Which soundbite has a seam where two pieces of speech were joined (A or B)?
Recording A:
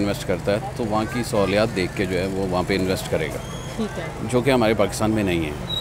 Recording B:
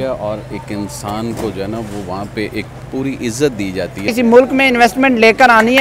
B